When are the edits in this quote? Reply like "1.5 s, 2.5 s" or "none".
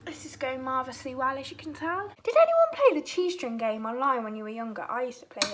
2.1 s